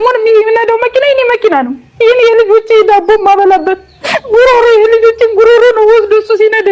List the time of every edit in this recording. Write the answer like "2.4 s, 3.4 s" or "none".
none